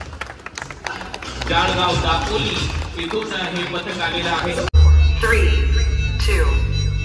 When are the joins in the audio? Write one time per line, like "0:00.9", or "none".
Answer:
0:04.7